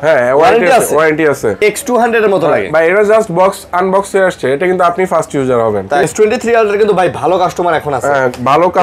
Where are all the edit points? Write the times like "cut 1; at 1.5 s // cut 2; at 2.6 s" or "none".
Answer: cut 1; at 1.6 s // cut 2; at 6.0 s